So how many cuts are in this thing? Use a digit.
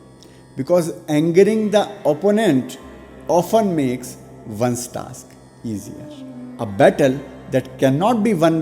1